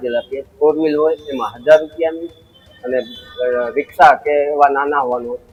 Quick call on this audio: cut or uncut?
uncut